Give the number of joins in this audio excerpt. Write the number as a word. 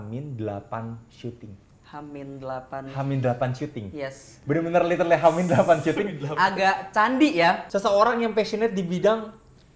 one